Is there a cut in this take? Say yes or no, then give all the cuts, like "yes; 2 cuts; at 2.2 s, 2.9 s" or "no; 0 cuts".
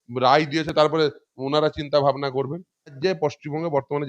yes; 1 cut; at 3.0 s